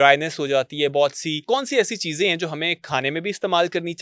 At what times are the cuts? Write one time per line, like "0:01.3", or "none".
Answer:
0:01.4